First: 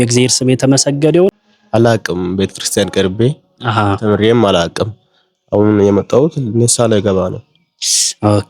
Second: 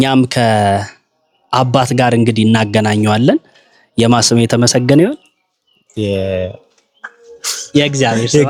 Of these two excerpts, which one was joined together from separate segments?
first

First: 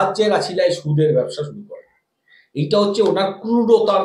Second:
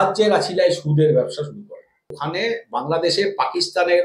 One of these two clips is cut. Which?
second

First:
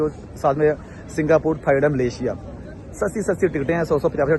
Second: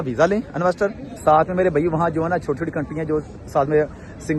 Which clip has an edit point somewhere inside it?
second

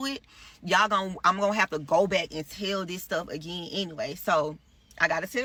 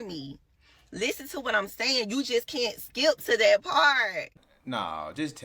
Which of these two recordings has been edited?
second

